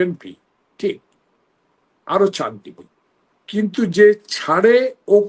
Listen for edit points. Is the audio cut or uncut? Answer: uncut